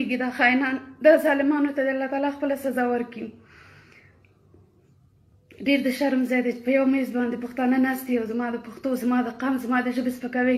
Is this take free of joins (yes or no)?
yes